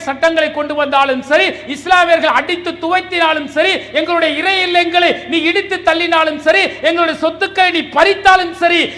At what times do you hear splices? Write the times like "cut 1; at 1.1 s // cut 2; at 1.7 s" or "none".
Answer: none

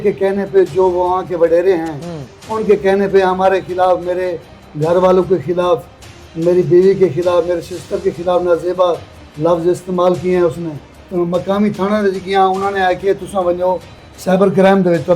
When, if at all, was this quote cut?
cut 1; at 11.0 s

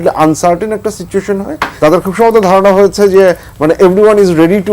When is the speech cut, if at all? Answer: cut 1; at 1.6 s

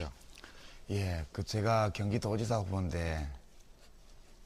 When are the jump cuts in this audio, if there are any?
cut 1; at 1.7 s

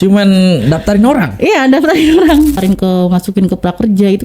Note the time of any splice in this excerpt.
cut 1; at 2.6 s

